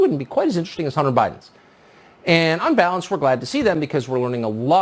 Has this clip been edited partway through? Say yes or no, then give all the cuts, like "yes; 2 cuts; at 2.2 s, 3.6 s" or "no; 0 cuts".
no; 0 cuts